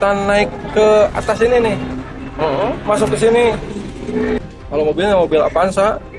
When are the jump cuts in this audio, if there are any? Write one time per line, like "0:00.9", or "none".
0:04.4

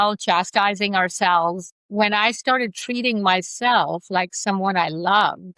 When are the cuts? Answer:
0:01.6

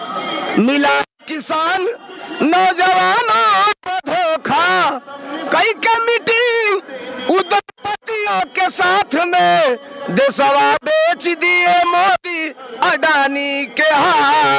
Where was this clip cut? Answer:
none

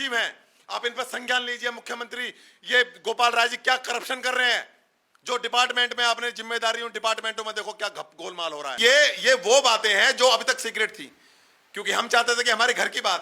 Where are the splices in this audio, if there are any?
0:08.8

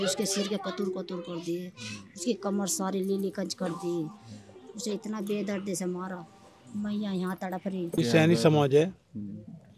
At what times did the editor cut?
0:08.0

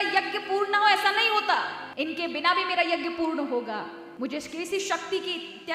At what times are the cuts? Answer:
0:01.8
0:04.0

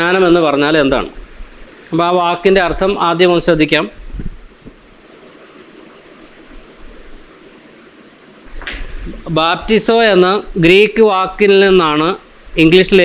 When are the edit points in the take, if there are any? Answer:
none

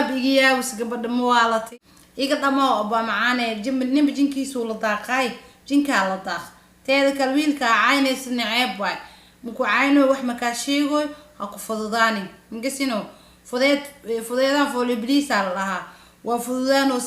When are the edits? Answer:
0:01.8

